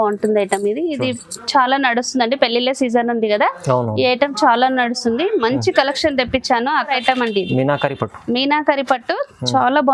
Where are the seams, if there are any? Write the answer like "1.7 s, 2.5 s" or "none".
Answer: 6.9 s